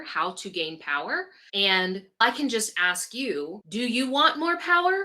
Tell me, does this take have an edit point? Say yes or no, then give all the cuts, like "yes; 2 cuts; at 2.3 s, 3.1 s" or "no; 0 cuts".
yes; 3 cuts; at 1.4 s, 2.2 s, 3.6 s